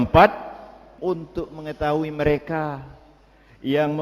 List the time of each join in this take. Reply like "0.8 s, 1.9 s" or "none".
0.9 s